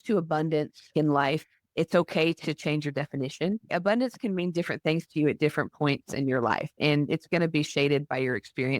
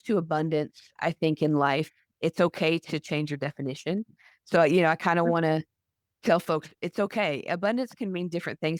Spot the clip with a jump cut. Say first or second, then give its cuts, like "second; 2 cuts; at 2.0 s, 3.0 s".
first; 2 cuts; at 0.9 s, 3.7 s